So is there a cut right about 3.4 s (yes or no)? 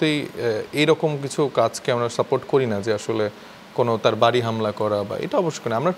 no